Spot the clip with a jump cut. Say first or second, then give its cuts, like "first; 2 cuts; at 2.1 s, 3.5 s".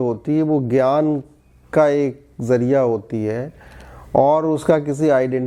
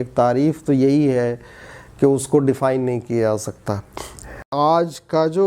second; 1 cut; at 4.5 s